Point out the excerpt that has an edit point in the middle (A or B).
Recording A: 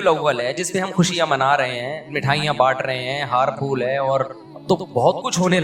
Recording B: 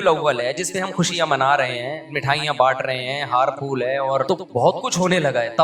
B